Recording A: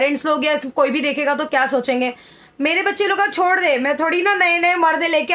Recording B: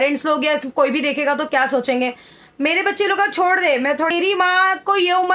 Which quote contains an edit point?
B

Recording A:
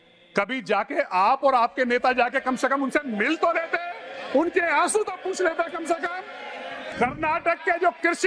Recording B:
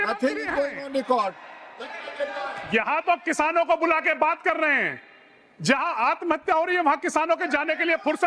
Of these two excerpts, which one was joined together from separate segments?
A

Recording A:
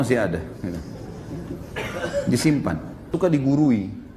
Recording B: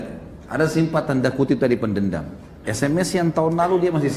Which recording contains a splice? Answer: A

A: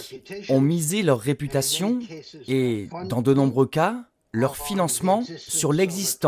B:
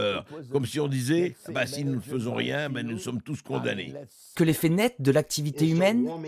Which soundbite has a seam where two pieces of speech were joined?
B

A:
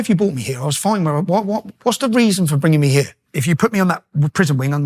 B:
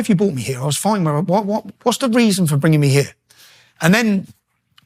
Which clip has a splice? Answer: A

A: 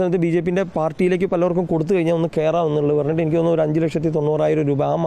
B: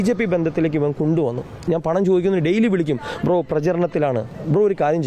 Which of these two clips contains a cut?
B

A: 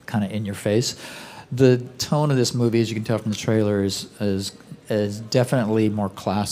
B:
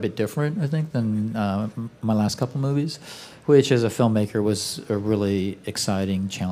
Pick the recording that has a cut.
A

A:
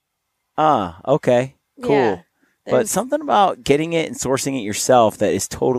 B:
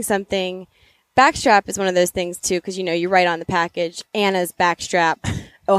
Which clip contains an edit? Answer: B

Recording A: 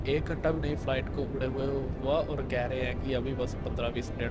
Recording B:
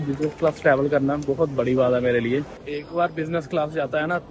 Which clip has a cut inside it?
B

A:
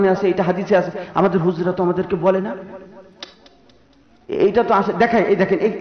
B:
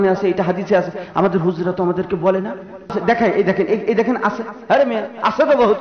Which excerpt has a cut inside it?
B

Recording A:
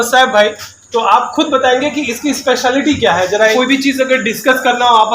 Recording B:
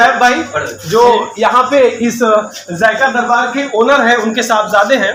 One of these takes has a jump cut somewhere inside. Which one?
A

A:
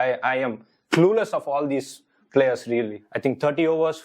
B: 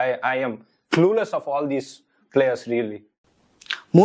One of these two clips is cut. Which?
A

